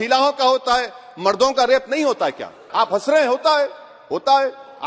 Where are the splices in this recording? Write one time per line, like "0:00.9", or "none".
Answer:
0:02.6